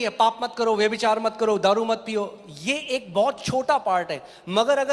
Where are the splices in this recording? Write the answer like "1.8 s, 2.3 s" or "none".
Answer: none